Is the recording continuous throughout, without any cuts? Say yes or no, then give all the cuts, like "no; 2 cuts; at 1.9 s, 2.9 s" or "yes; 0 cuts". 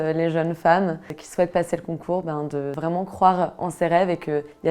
no; 2 cuts; at 1.1 s, 2.7 s